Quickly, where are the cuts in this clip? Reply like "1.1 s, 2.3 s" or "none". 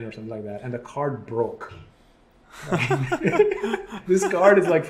3.9 s